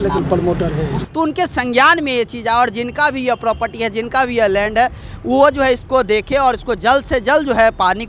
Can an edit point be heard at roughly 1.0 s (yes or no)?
yes